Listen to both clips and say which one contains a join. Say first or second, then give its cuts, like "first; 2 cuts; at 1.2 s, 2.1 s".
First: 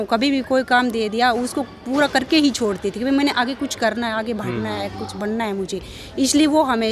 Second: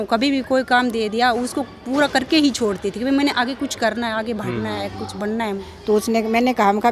second; 1 cut; at 5.6 s